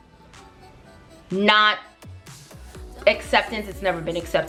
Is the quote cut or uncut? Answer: uncut